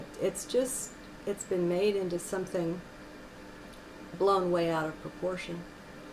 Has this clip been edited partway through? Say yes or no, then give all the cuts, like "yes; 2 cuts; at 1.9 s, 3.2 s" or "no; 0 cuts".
yes; 1 cut; at 4.3 s